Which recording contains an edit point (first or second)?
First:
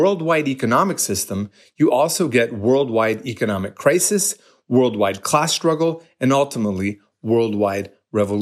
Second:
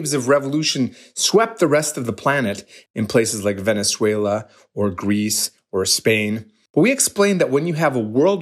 second